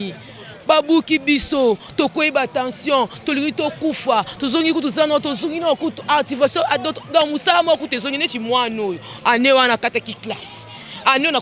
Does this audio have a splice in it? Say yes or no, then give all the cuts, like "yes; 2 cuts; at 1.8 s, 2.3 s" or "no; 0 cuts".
no; 0 cuts